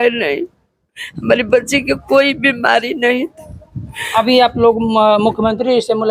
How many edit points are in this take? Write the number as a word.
zero